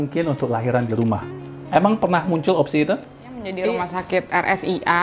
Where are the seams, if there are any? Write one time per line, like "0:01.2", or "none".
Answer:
0:03.5